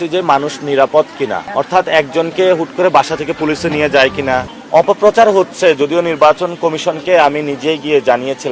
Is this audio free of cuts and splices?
no; 2 cuts; at 1.4 s, 4.6 s

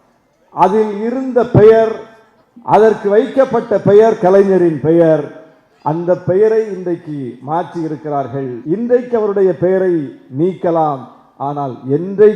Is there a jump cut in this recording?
yes; 1 cut; at 8.6 s

